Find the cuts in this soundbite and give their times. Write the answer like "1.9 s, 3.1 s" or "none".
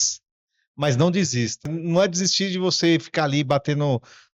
1.7 s